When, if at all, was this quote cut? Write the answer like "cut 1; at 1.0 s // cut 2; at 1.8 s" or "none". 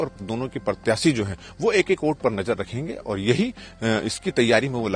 none